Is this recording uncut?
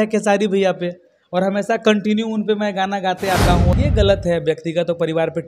no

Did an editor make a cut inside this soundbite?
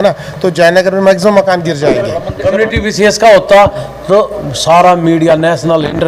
yes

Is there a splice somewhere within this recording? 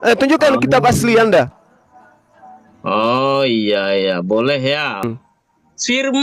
yes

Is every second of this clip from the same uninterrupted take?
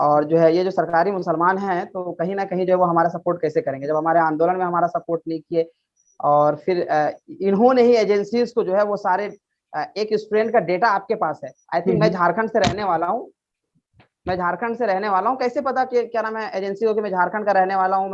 yes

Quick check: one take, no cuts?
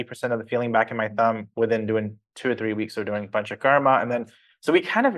yes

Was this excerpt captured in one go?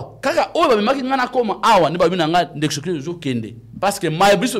yes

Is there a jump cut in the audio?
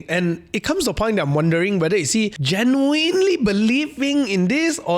yes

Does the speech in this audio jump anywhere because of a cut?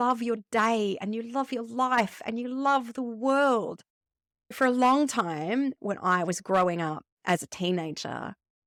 no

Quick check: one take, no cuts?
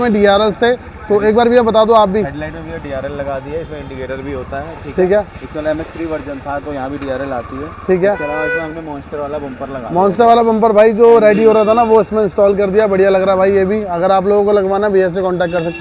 yes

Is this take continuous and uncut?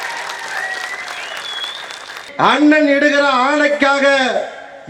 no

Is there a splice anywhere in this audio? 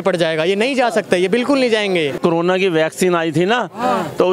yes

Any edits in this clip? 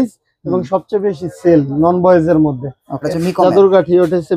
yes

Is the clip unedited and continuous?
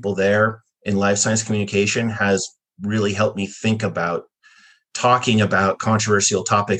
yes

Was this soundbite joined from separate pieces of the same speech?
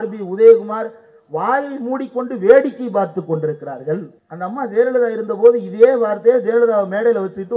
yes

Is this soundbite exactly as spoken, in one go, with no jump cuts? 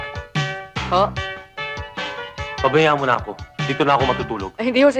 yes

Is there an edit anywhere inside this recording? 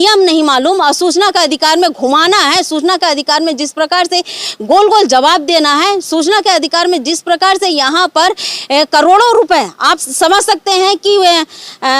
no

